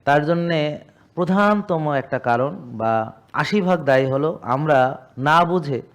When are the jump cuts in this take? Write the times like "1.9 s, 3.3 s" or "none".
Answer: none